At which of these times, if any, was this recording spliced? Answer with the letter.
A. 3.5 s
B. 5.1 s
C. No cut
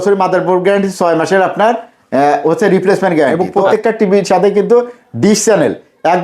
A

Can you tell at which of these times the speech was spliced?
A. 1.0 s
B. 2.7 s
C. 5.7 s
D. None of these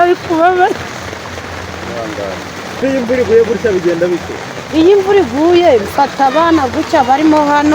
B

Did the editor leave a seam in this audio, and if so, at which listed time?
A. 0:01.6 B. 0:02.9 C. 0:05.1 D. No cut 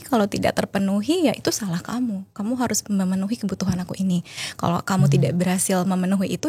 D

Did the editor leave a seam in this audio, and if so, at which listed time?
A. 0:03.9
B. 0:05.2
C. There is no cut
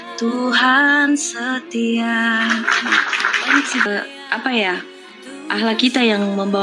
A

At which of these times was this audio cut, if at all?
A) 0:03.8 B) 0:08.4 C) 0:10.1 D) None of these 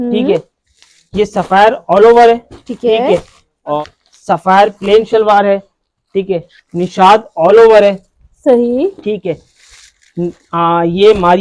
A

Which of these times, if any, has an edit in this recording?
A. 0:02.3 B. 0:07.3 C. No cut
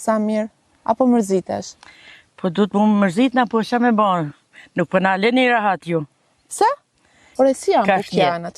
B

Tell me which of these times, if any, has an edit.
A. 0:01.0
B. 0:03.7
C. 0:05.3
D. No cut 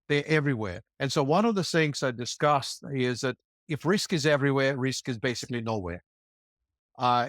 B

